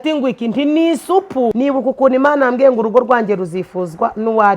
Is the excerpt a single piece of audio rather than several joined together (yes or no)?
no